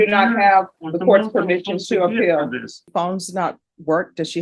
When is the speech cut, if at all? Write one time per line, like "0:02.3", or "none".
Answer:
0:02.8